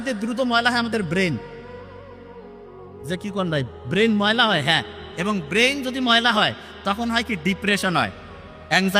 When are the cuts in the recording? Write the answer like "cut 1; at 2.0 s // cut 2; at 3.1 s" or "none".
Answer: none